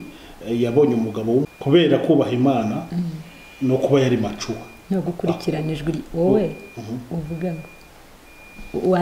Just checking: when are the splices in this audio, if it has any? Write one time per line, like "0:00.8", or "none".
0:01.5